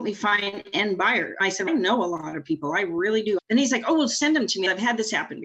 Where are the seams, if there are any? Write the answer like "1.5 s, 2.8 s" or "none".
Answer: 1.5 s, 3.4 s, 4.7 s